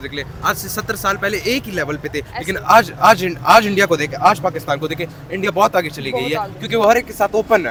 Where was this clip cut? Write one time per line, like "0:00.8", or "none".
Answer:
none